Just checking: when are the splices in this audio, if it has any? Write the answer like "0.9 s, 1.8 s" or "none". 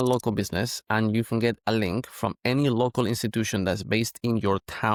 none